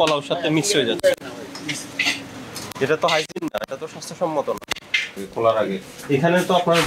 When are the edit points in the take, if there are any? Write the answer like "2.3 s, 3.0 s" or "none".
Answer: 5.2 s